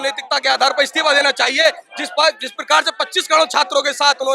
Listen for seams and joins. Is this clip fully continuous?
yes; 0 cuts

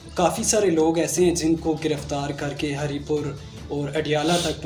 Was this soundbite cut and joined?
no; 0 cuts

